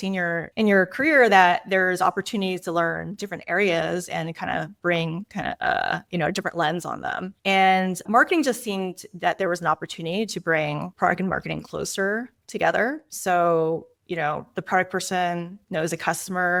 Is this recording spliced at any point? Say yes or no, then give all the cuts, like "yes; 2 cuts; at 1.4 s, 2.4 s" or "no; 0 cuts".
no; 0 cuts